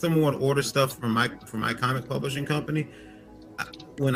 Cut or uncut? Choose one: uncut